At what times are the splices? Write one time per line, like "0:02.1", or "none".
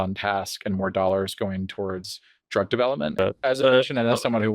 0:03.1

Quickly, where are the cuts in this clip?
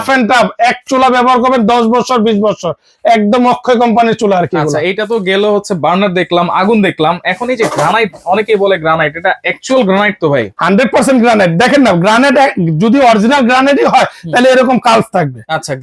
none

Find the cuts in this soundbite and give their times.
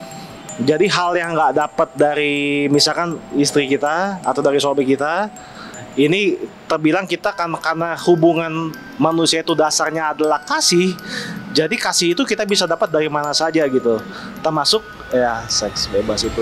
none

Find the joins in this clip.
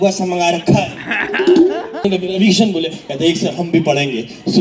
0:02.1

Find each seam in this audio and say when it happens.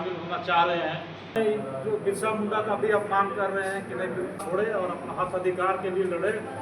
0:01.4
0:04.4

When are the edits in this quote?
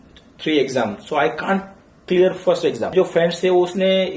0:02.9

